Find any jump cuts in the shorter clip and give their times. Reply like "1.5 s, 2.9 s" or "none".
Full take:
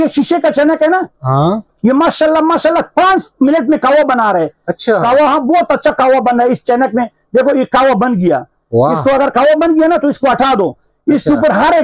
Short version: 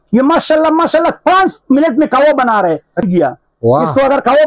3.1 s